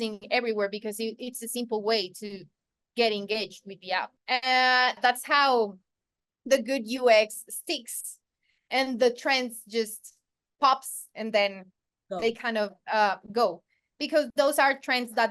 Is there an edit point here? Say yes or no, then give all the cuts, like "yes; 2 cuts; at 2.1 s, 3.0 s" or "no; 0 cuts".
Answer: yes; 2 cuts; at 4.1 s, 5.0 s